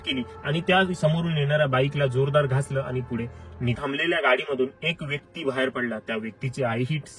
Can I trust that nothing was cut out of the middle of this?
no; 1 cut; at 3.7 s

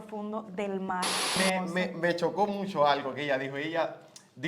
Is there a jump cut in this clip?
yes; 1 cut; at 1.4 s

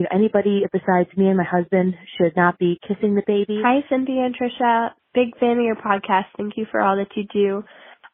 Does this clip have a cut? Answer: yes; 2 cuts; at 3.6 s, 5.0 s

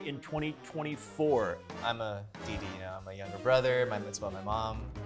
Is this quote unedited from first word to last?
no; 1 cut; at 1.7 s

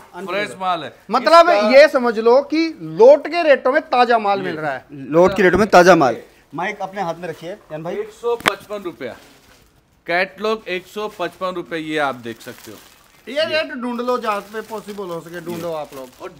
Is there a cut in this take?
no; 0 cuts

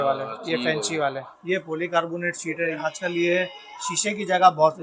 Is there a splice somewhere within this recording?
yes; 2 cuts; at 1.3 s, 2.8 s

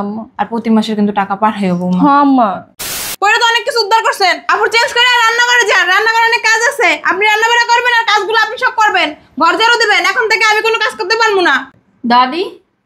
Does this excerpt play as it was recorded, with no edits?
no; 1 cut; at 3.1 s

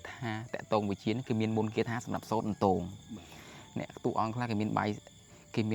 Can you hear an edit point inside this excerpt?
no; 0 cuts

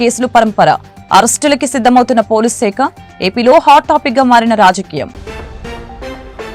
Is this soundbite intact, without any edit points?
yes; 0 cuts

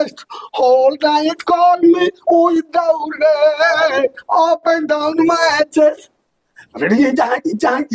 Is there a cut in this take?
no; 0 cuts

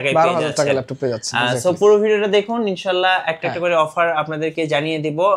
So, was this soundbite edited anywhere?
no; 0 cuts

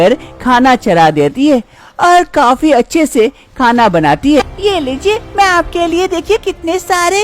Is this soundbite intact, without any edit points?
no; 1 cut; at 4.4 s

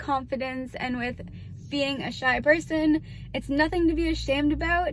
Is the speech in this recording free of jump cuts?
yes; 0 cuts

